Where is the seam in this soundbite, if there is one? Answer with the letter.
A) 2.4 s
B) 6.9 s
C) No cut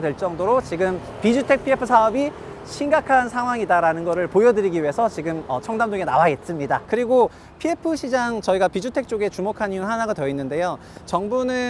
B